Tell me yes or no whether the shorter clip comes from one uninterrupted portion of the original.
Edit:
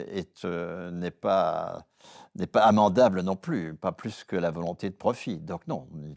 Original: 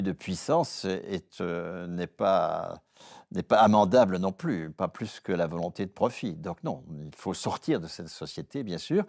yes